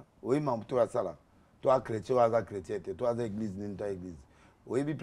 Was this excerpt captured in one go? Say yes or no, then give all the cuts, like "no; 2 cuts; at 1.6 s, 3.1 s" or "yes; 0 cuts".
yes; 0 cuts